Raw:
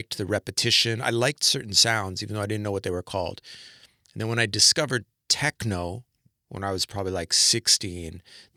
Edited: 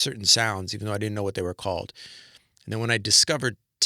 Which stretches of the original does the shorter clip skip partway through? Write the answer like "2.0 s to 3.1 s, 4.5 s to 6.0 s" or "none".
none